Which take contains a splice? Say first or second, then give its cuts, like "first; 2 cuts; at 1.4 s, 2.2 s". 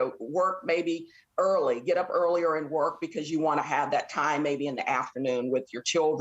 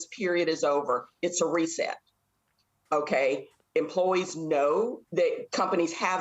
second; 1 cut; at 5.0 s